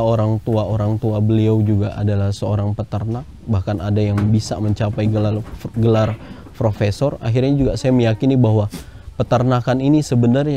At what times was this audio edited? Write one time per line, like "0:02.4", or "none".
none